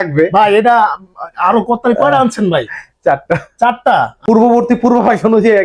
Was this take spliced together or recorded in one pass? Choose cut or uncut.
cut